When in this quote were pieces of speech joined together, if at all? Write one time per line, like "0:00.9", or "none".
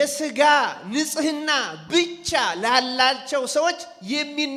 none